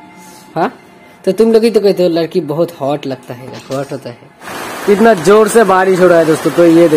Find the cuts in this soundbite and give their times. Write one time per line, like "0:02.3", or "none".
0:04.5